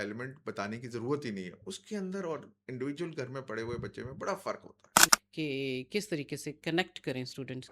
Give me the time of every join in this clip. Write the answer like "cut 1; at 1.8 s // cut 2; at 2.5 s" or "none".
cut 1; at 5.0 s